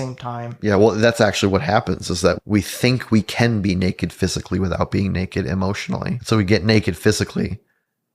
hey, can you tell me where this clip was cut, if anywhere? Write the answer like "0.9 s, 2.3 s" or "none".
2.4 s, 6.2 s